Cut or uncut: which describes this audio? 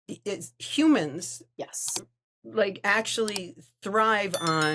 uncut